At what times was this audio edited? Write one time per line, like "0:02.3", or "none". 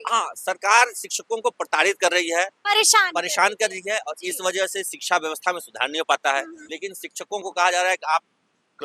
0:06.6